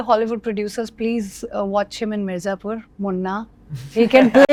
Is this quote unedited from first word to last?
yes; 0 cuts

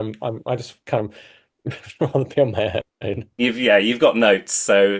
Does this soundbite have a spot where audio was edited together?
yes; 1 cut; at 3.4 s

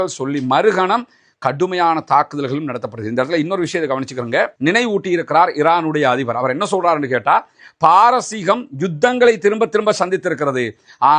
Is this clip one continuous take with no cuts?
no; 1 cut; at 4.5 s

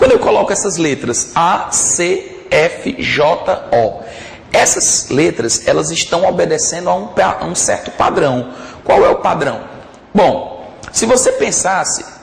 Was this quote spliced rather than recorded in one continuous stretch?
yes; 1 cut; at 8.7 s

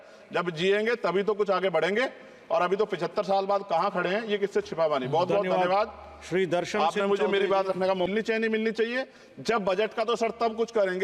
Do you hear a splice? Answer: yes; 1 cut; at 8.1 s

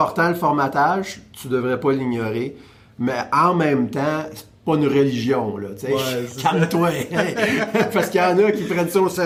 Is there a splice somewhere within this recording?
no; 0 cuts

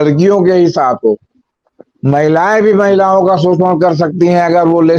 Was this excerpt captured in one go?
yes; 0 cuts

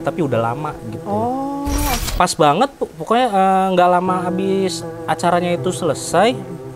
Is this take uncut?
no; 1 cut; at 2.0 s

